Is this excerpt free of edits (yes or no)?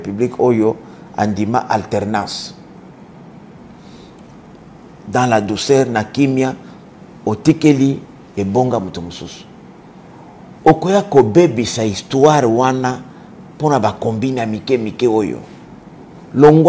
yes